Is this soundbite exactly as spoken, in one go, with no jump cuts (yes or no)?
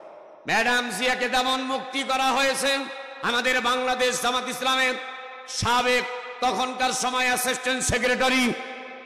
yes